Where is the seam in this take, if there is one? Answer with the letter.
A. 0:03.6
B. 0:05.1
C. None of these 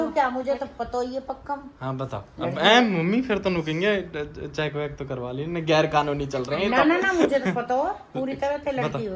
C